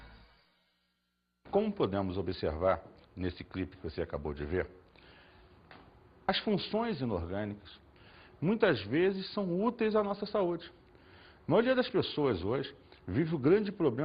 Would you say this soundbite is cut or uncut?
uncut